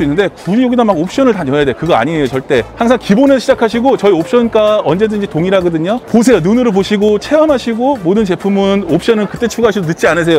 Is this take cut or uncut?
uncut